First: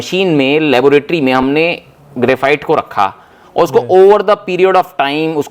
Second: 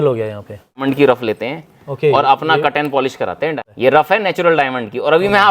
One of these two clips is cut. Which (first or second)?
second